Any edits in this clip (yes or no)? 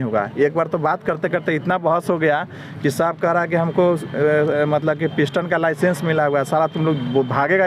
no